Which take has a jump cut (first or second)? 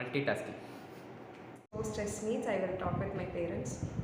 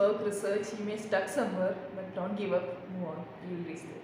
first